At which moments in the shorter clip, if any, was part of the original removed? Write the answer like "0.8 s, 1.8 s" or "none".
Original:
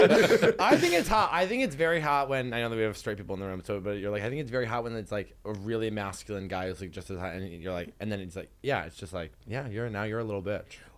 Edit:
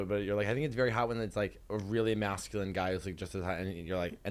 none